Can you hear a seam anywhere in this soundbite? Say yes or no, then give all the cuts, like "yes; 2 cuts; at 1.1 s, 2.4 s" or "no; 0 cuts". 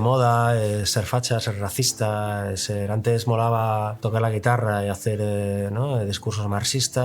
yes; 1 cut; at 4.0 s